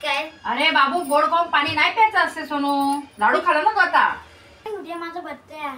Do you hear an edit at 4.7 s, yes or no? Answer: yes